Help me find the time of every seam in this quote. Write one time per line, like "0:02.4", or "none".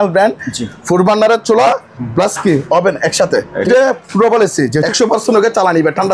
0:03.6
0:04.9